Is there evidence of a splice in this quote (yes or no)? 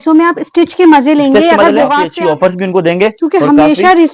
yes